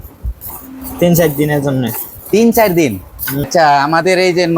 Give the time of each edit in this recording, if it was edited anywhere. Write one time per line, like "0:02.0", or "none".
0:03.5